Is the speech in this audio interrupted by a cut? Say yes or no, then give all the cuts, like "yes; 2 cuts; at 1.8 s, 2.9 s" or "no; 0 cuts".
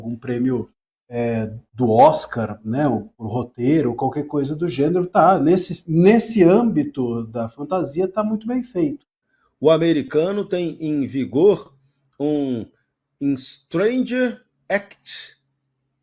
yes; 1 cut; at 9.1 s